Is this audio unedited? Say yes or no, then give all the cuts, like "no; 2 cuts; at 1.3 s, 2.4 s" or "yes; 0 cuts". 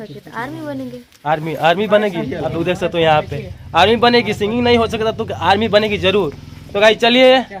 yes; 0 cuts